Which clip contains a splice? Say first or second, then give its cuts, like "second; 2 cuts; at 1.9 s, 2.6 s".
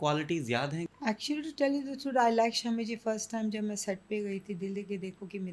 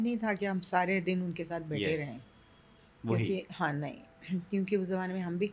first; 1 cut; at 0.9 s